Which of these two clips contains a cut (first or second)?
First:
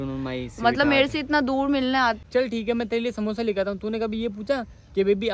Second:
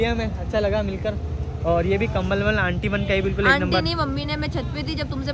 first